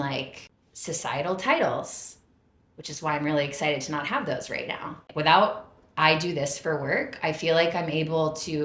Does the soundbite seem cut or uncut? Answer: cut